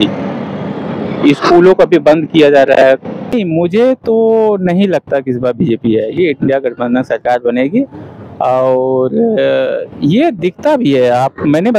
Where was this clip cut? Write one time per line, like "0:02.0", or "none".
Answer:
0:03.3